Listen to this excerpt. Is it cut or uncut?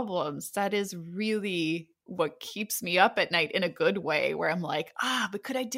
uncut